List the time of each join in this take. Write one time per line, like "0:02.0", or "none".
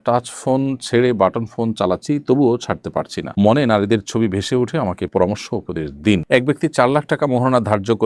0:06.2

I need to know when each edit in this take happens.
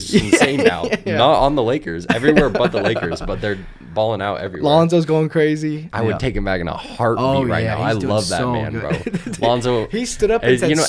0:05.9

